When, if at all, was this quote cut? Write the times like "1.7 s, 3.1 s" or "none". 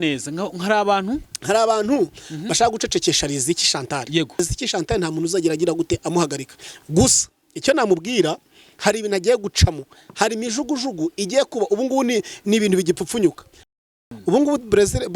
4.4 s, 13.8 s